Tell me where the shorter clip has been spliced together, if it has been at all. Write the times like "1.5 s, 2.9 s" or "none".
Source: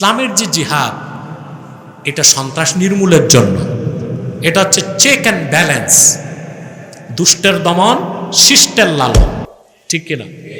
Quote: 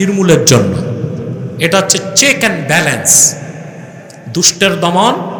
none